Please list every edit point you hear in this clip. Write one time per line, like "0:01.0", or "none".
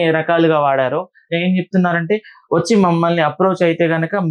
0:01.3